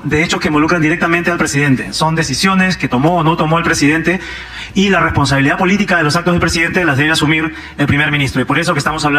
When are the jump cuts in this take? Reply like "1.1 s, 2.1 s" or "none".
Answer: none